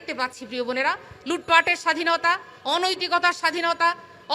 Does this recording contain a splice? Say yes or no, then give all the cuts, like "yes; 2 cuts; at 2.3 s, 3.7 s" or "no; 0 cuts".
no; 0 cuts